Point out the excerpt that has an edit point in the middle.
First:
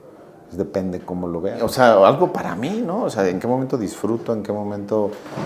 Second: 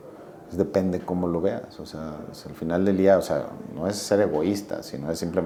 first; 1 cut; at 1.6 s

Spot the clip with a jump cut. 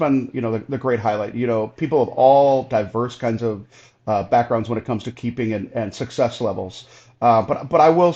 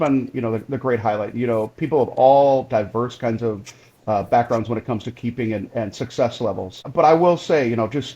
second; 1 cut; at 6.9 s

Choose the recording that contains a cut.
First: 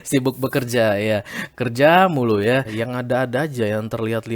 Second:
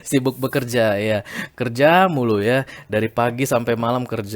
first; 1 cut; at 2.8 s

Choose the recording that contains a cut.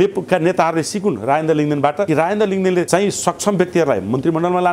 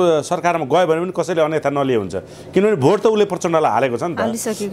first; 2 cuts; at 2.1 s, 2.9 s

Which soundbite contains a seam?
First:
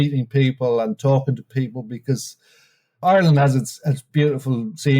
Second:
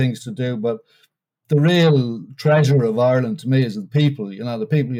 first; 2 cuts; at 3.0 s, 4.1 s

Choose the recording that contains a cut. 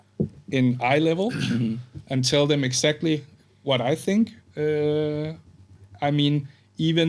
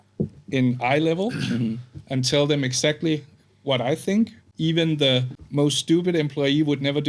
second; 2 cuts; at 4.4 s, 5.4 s

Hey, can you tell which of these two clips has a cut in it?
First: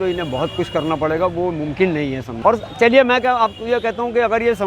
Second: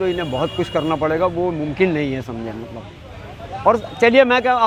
first; 1 cut; at 2.3 s

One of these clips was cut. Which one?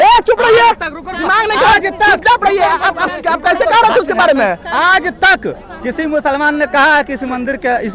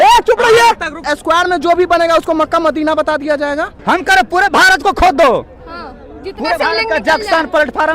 second; 2 cuts; at 1.1 s, 3.7 s

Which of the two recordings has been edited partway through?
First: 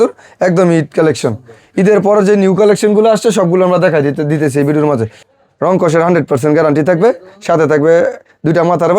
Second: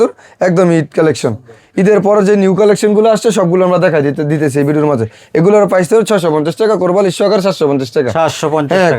first; 1 cut; at 5.2 s

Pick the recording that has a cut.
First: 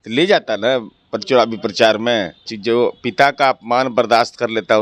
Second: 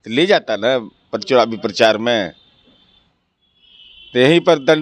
first; 1 cut; at 2.5 s

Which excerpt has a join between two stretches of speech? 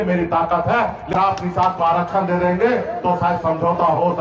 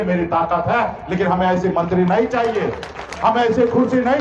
first; 1 cut; at 1.2 s

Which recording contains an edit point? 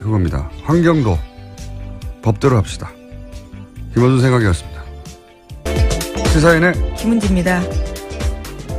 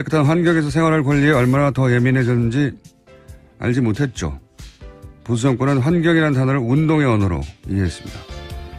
second; 1 cut; at 6.0 s

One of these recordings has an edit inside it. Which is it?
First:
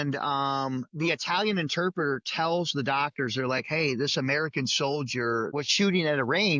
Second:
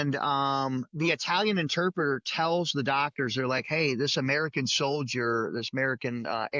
first; 1 cut; at 5.5 s

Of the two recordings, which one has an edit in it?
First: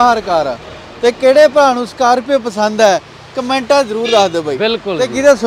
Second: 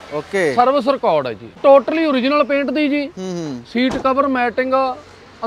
second; 1 cut; at 1.6 s

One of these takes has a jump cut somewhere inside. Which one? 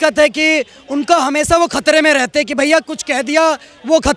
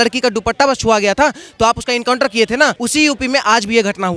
second; 1 cut; at 2.8 s

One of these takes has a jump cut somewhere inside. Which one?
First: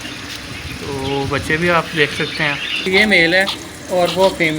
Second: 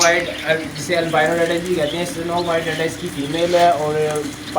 first; 1 cut; at 2.9 s

